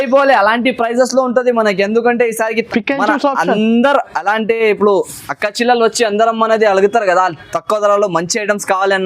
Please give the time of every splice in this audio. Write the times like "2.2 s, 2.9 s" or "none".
2.6 s